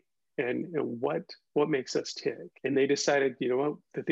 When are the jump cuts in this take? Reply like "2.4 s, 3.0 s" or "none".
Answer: 2.5 s